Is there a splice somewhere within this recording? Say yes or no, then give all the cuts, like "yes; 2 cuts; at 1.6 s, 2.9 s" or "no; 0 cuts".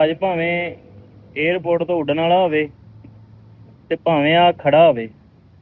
no; 0 cuts